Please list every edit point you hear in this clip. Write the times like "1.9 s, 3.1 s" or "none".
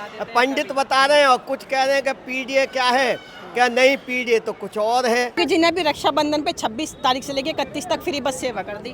5.4 s

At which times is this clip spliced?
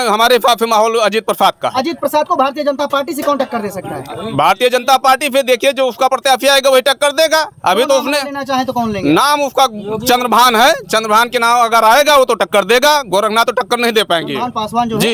none

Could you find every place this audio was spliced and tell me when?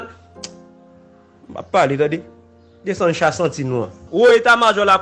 4.0 s

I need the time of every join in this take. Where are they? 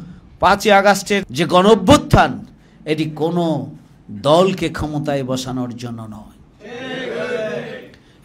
1.3 s

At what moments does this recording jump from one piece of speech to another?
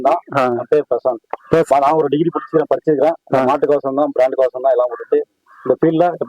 1.7 s

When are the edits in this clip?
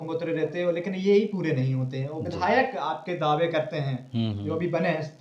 none

